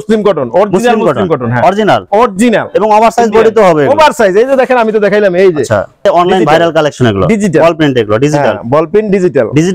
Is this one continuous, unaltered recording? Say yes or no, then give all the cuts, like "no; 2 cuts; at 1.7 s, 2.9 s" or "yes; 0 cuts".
no; 1 cut; at 6.1 s